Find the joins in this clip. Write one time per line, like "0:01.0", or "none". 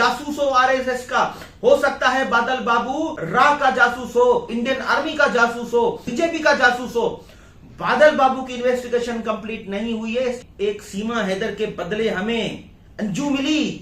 0:03.2
0:04.5
0:06.1
0:10.4